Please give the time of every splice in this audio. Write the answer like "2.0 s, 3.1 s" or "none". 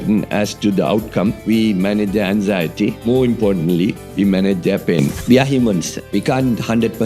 1.4 s, 3.1 s, 5.2 s